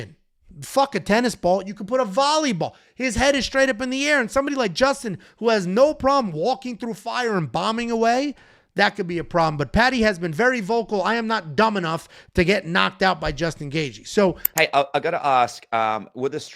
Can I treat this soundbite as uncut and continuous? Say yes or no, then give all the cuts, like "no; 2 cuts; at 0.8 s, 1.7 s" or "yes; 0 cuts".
no; 1 cut; at 14.4 s